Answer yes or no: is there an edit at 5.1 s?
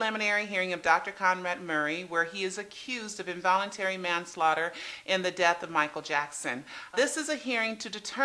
yes